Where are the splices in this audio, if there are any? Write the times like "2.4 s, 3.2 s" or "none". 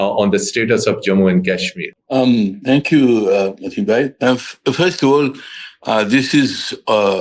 none